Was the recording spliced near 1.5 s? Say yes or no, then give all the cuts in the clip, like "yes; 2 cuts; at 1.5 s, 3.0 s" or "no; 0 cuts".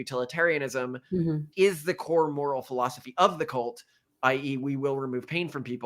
yes; 1 cut; at 1.5 s